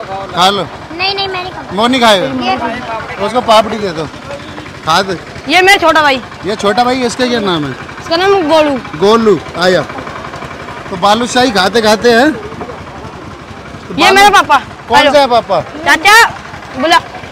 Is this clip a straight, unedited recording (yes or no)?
yes